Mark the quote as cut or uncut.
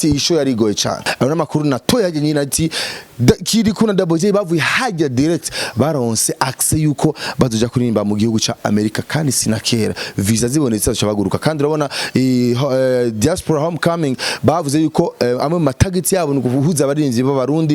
cut